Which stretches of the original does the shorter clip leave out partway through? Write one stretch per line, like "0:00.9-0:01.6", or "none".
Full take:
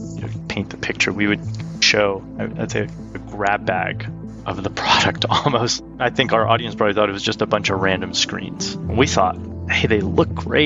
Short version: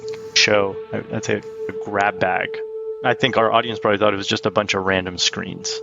0:04.3-0:05.8